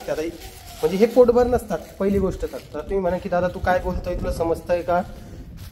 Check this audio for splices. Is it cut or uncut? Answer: uncut